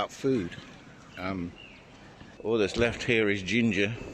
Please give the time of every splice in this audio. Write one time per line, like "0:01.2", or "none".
0:02.5